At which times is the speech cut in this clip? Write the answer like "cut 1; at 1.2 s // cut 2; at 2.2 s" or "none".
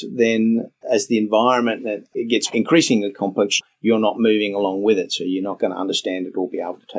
none